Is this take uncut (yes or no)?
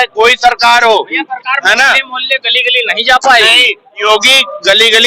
yes